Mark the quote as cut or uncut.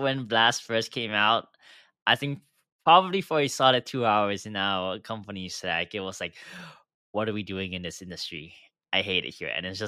uncut